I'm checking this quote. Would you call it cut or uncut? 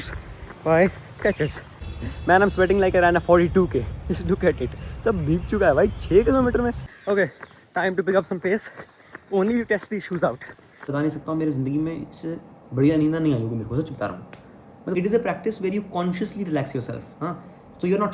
cut